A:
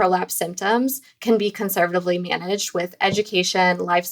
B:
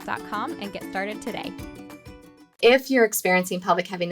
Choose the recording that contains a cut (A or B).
B